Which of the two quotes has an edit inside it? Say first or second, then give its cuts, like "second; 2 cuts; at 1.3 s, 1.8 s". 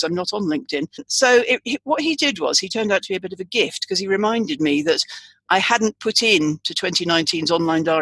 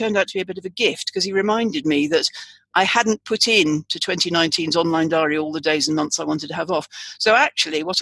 first; 1 cut; at 1.1 s